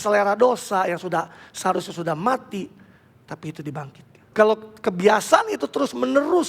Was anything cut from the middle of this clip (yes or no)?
yes